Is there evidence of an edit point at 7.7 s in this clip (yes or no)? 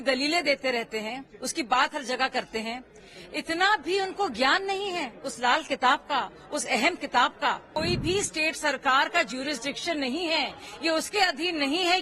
yes